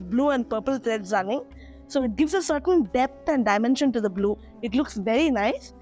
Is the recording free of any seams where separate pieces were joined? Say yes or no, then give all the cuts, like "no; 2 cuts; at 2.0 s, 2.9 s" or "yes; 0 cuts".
yes; 0 cuts